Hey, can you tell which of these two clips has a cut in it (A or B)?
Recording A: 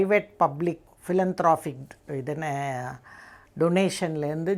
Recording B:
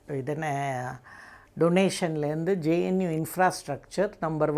A